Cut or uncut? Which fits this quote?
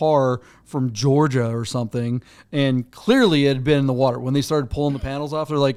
uncut